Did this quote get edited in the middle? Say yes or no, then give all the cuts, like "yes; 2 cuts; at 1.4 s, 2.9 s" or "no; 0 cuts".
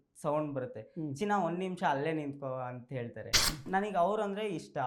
yes; 1 cut; at 3.4 s